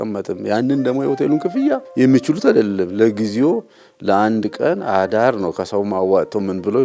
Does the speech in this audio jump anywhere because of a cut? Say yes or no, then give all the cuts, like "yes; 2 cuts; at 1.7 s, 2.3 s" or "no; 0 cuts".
yes; 1 cut; at 1.9 s